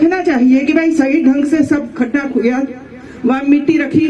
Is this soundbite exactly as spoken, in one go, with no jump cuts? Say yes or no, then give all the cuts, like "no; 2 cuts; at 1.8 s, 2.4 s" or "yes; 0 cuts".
yes; 0 cuts